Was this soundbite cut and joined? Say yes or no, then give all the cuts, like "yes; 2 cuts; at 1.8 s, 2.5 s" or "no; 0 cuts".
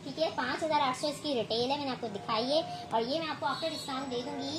no; 0 cuts